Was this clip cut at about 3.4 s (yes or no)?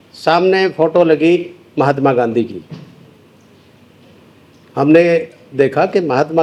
no